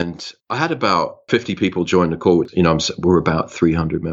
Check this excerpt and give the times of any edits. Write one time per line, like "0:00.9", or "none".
0:01.2
0:02.5